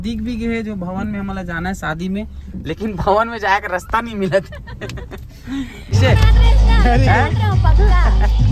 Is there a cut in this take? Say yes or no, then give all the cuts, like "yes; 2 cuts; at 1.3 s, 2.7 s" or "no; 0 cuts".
yes; 1 cut; at 5.9 s